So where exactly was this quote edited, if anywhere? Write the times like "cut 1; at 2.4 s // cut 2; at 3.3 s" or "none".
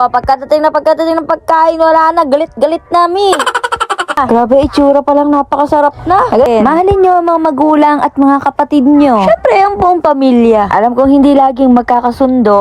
cut 1; at 4.2 s // cut 2; at 6.5 s